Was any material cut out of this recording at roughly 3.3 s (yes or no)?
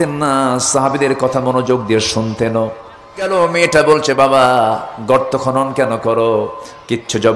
yes